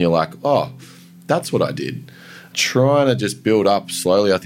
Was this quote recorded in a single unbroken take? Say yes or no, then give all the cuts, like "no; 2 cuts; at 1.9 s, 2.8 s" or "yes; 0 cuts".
no; 1 cut; at 2.4 s